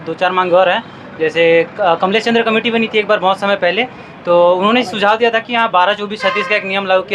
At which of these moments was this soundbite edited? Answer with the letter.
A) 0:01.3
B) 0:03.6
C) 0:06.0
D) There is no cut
D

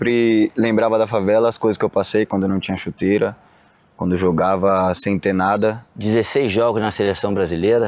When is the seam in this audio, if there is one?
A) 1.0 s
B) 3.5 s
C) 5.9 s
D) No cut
C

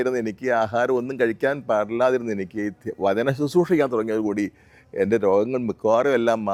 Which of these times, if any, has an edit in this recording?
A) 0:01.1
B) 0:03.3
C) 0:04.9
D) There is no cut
D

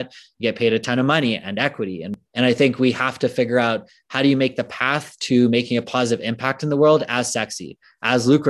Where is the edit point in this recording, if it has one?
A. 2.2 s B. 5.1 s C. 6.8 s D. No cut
A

